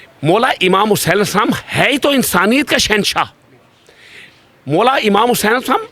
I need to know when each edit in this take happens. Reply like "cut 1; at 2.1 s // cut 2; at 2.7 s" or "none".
none